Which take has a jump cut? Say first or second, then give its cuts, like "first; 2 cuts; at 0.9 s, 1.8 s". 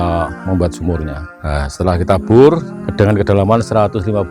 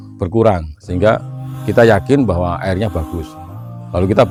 first; 2 cuts; at 1.2 s, 2.8 s